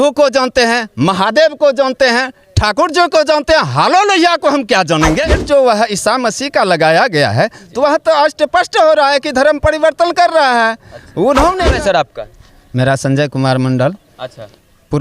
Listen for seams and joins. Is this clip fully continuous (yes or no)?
no